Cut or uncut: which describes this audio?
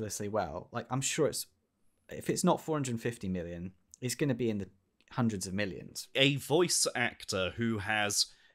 cut